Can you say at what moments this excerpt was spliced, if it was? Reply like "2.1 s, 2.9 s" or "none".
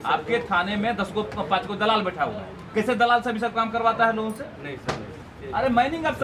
5.3 s